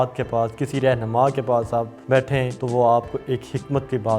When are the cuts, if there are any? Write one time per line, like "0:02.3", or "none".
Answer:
0:02.3

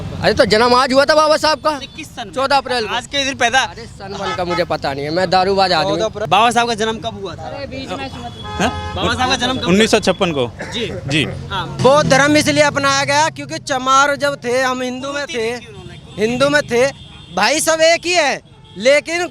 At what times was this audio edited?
0:06.2
0:11.8

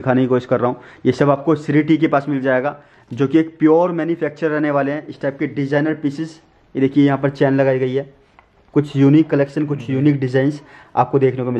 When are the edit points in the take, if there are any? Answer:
none

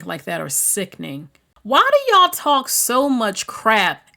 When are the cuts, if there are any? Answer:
0:01.5

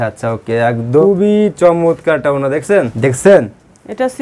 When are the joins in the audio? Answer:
0:01.0
0:02.9

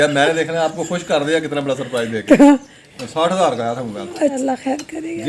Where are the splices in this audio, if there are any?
0:02.8
0:04.4

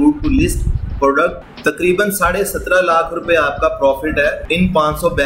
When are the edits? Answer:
0:01.4
0:04.4

